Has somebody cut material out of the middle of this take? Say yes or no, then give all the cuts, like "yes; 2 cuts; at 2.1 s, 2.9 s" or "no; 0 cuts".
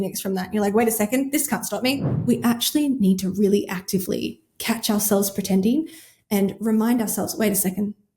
yes; 1 cut; at 2.1 s